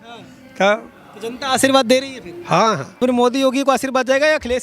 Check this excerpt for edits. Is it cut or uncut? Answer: cut